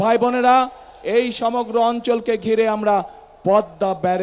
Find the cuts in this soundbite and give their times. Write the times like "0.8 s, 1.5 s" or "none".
none